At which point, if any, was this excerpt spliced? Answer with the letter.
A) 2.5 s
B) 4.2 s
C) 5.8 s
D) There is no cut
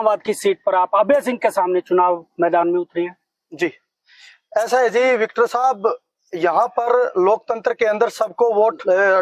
D